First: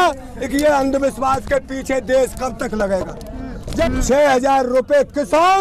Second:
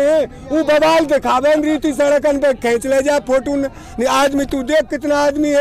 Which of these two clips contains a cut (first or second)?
first